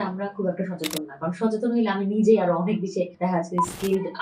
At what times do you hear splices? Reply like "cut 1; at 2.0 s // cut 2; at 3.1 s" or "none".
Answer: cut 1; at 3.1 s